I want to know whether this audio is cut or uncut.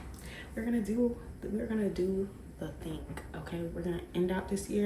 uncut